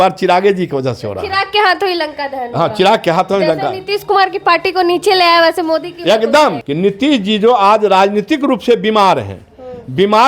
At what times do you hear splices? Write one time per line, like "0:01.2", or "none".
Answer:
0:06.6